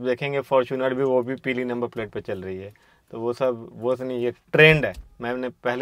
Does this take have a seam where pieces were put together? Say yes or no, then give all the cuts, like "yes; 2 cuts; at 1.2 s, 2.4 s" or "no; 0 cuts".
no; 0 cuts